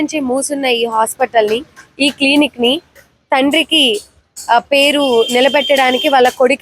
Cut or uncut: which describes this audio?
uncut